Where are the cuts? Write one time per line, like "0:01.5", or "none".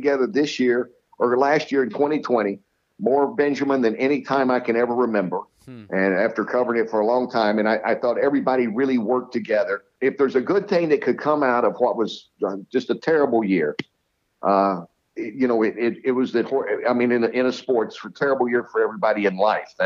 0:09.8